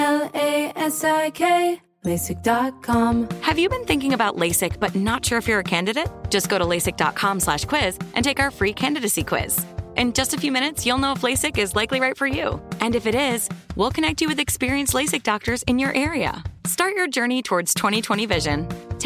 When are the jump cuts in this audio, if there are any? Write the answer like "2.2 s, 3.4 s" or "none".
3.1 s